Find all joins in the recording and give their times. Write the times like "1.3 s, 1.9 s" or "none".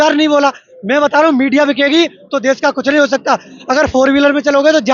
none